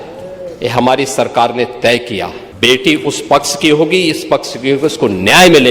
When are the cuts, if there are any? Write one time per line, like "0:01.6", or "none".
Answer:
0:02.4